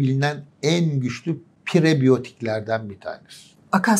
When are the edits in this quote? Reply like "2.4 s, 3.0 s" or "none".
none